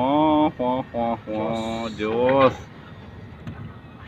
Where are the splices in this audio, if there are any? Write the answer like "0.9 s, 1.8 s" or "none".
none